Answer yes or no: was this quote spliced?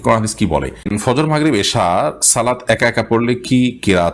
yes